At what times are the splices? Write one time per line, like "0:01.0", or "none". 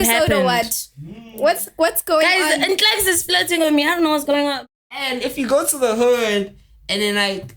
0:04.6